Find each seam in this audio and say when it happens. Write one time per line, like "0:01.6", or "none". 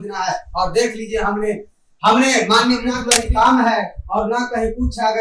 0:03.1